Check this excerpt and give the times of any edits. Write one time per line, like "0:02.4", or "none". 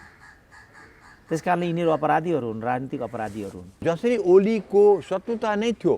0:03.7